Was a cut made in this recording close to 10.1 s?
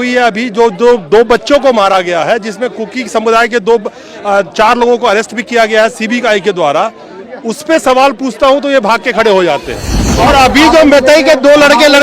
yes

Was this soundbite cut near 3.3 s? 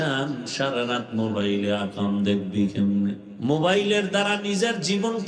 yes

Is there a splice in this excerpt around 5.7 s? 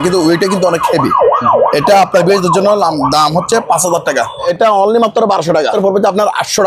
yes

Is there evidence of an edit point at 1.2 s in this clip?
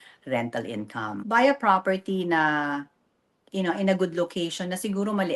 yes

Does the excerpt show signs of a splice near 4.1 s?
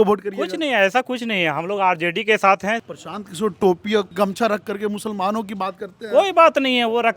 yes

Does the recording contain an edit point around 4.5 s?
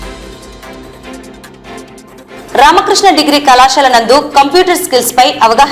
no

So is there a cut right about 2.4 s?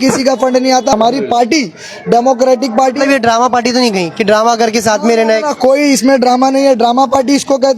no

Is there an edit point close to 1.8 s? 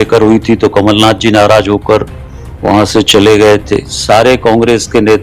no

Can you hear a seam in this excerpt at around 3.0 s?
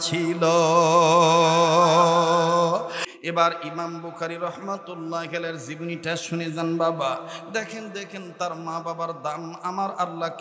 yes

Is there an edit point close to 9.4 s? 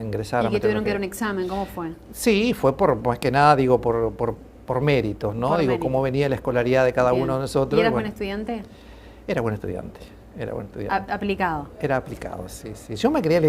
no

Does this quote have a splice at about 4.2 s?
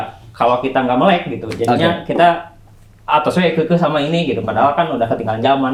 no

